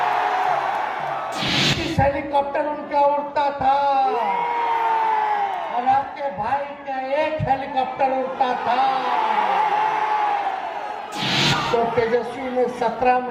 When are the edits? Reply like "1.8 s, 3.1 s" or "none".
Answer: 1.5 s, 11.2 s